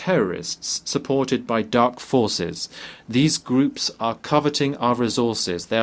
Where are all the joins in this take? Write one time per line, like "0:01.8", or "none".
none